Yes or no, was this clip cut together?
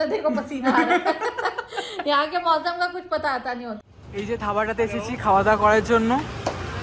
yes